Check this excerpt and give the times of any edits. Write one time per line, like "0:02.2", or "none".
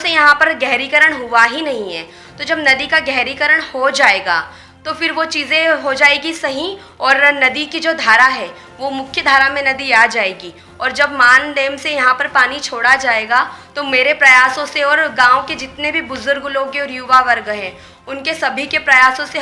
none